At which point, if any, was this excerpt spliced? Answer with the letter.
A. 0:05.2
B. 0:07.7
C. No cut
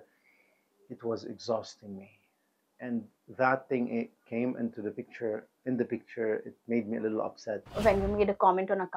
B